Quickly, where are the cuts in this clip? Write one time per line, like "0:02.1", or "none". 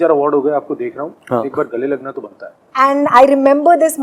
0:02.6